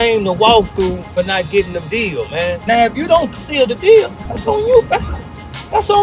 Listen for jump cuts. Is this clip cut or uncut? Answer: cut